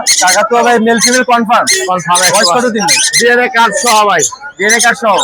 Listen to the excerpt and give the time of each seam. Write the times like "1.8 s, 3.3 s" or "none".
none